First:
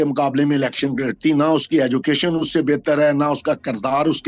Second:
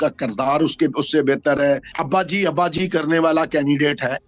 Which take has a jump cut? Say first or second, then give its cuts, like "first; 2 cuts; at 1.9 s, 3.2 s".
second; 1 cut; at 2.0 s